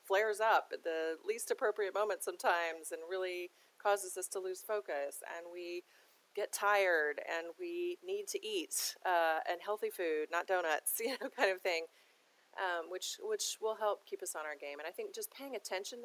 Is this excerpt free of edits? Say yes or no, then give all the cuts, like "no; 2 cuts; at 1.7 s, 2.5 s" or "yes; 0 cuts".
no; 1 cut; at 14.8 s